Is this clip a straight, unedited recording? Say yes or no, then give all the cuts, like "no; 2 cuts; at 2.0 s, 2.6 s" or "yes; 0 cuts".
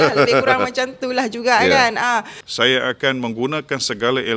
no; 1 cut; at 2.4 s